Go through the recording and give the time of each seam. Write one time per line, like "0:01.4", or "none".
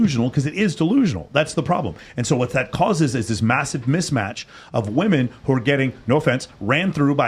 0:02.0